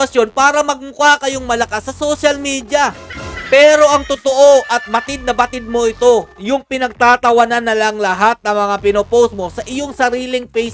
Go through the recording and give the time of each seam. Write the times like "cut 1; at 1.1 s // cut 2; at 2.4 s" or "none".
none